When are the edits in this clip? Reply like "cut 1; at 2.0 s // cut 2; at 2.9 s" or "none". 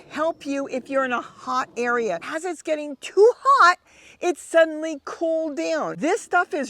cut 1; at 2.3 s // cut 2; at 5.9 s